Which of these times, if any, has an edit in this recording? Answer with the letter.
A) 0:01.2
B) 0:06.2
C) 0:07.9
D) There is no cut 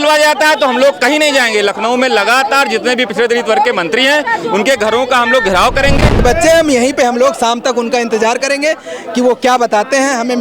B